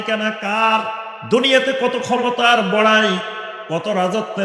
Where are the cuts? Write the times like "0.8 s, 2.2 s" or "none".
1.1 s